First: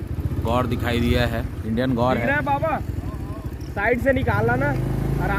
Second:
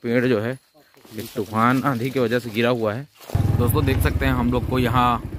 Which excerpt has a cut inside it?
second; 1 cut; at 3.4 s

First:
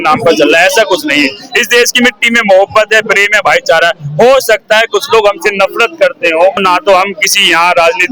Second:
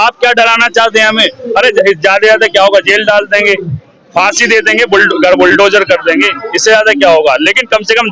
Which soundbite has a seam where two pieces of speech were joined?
first; 1 cut; at 6.6 s

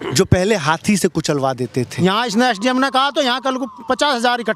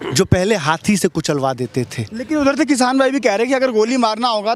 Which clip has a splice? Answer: first; 1 cut; at 1.9 s

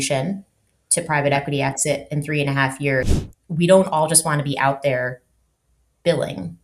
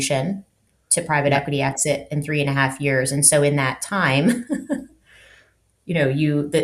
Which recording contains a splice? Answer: first; 1 cut; at 3.1 s

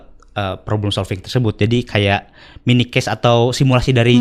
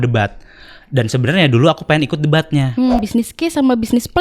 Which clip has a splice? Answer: second; 1 cut; at 3.0 s

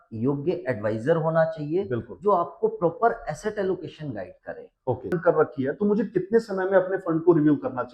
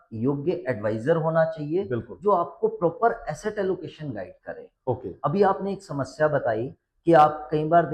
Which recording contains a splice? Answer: first; 1 cut; at 5.1 s

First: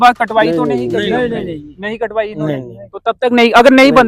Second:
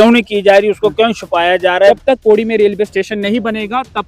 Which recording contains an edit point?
second; 1 cut; at 2.0 s

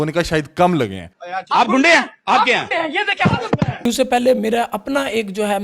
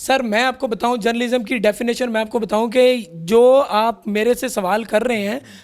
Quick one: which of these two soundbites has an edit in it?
first; 1 cut; at 3.7 s

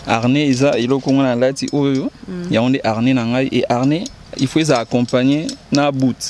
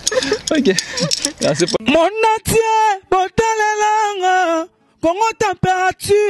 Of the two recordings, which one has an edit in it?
second; 1 cut; at 1.8 s

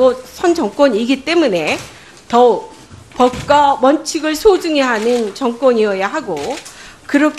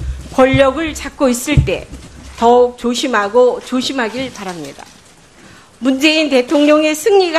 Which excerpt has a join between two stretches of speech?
first; 1 cut; at 2.8 s

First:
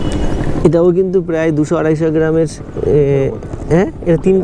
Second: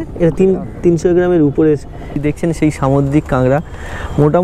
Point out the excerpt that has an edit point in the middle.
second; 1 cut; at 2.2 s

